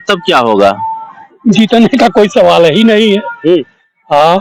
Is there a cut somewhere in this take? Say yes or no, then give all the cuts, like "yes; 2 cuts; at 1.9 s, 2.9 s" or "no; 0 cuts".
no; 0 cuts